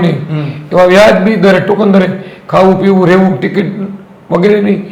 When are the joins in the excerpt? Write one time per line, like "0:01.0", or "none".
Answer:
none